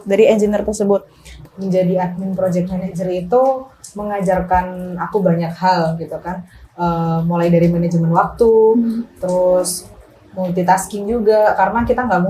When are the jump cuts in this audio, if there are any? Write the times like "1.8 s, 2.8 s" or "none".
1.3 s